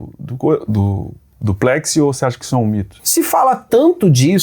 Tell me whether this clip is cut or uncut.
cut